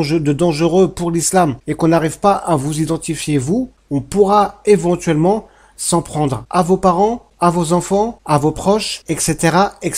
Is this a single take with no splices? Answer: no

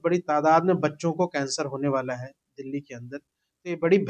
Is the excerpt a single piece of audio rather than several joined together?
yes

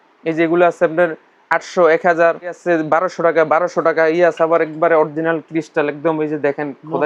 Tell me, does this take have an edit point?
no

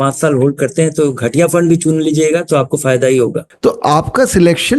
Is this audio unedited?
no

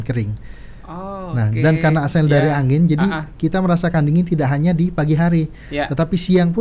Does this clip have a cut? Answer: no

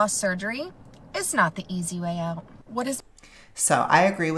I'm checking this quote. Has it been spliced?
no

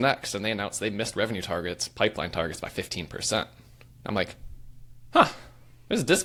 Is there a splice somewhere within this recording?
no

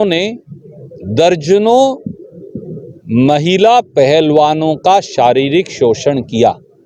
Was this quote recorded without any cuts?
yes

